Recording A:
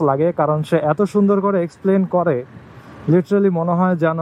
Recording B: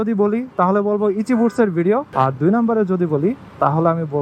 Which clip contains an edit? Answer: B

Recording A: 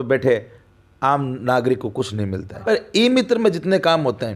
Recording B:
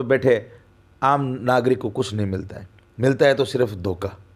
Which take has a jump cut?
A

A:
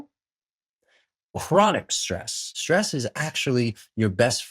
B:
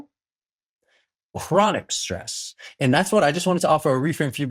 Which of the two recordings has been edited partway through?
A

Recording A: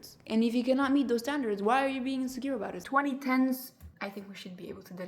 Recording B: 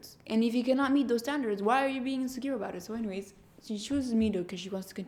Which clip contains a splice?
A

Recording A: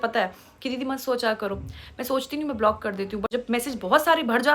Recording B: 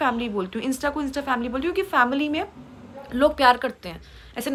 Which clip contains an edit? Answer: A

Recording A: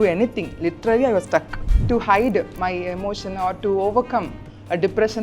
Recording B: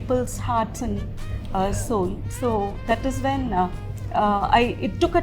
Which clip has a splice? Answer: A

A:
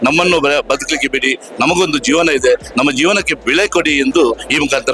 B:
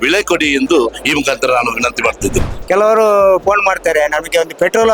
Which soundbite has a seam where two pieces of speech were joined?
B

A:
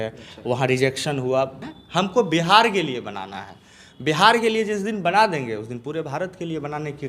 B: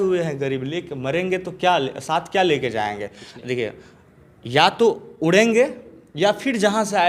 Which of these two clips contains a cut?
A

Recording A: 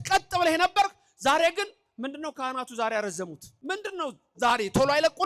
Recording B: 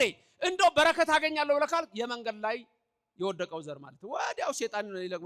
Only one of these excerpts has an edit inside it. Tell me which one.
A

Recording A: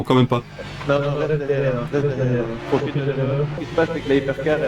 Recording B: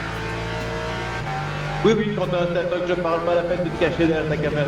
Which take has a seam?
A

